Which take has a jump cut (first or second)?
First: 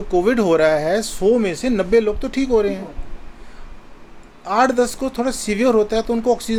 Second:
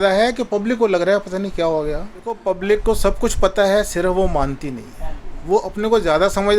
second